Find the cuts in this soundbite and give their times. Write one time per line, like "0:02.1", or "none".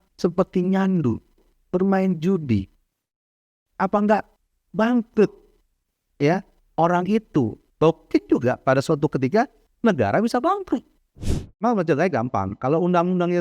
0:11.5